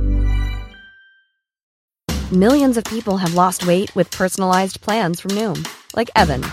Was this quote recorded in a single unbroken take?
no; 1 cut; at 1.6 s

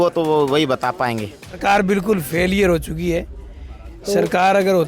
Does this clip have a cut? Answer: yes; 1 cut; at 1.5 s

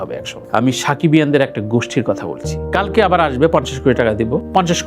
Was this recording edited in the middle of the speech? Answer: yes; 1 cut; at 2.6 s

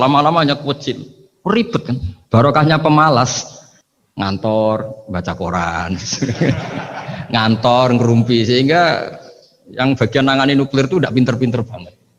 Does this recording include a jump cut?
no; 0 cuts

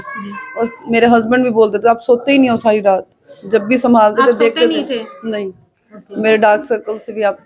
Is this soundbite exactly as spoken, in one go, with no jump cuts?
yes; 0 cuts

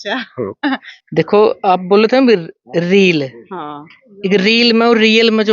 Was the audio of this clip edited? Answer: yes; 1 cut; at 1.0 s

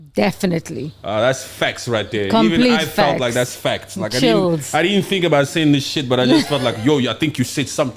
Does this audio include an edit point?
no; 0 cuts

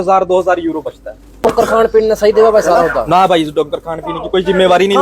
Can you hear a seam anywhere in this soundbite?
yes; 1 cut; at 1.4 s

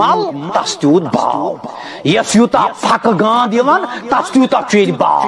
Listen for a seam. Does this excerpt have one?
no; 0 cuts

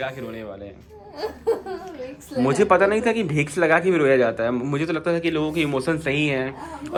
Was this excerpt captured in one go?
yes; 0 cuts

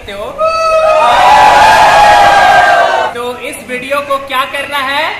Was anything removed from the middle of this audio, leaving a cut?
yes; 1 cut; at 3.1 s

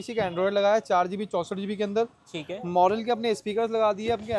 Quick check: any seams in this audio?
no; 0 cuts

